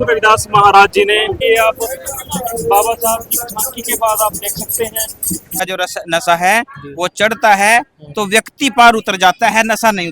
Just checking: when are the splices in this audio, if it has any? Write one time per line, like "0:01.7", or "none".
0:01.4
0:05.6